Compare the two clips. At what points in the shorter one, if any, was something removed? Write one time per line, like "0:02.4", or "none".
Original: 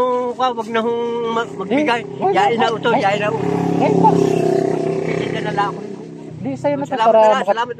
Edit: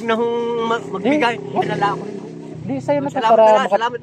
0:01.6